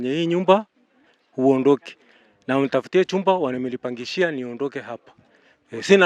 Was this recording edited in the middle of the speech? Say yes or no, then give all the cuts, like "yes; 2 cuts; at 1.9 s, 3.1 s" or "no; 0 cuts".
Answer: no; 0 cuts